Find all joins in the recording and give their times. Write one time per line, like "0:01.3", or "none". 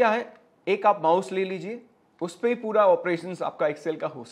none